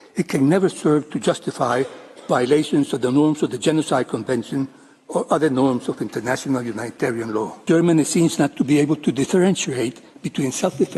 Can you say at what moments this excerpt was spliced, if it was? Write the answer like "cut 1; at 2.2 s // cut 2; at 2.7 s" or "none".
cut 1; at 7.5 s